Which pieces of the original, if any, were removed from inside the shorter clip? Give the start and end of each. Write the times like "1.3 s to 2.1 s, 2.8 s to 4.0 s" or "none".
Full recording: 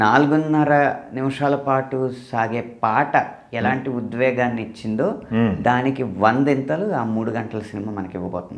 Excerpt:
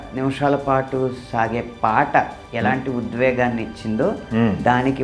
none